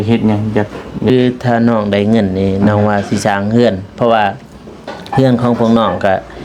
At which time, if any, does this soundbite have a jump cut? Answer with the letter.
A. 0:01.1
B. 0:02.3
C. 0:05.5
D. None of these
A